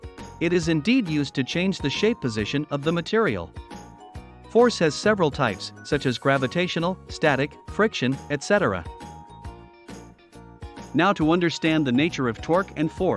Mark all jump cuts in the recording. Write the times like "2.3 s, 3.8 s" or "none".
8.8 s, 10.9 s

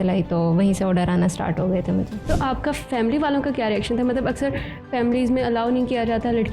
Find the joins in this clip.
2.2 s

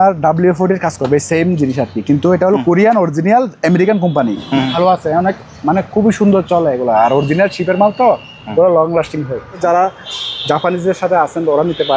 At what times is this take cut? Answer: 4.7 s, 9.6 s

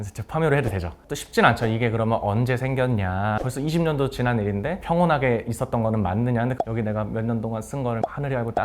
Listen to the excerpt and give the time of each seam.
6.6 s

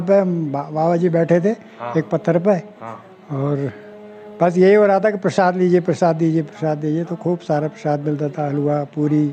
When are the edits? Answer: none

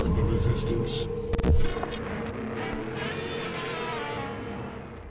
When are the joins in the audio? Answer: none

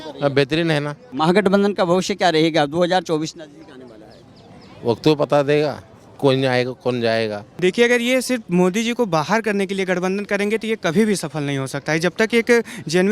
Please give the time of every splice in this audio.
1.0 s, 7.4 s

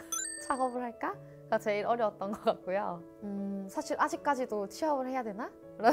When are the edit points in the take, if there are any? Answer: 3.1 s

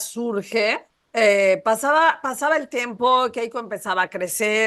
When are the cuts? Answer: 0.9 s

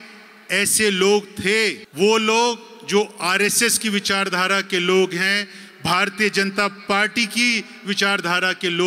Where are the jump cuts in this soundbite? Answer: 1.8 s

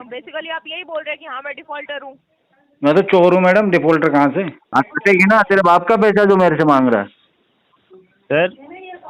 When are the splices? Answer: 4.6 s

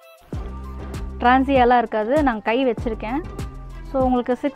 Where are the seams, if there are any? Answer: 1.1 s

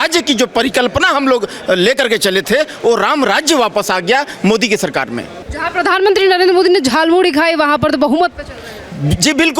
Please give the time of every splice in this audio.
5.4 s

